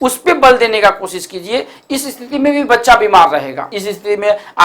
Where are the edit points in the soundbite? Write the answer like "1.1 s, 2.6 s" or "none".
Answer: 3.7 s